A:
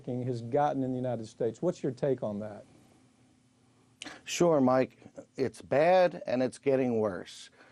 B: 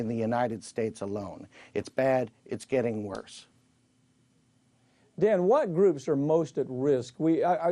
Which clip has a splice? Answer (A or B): B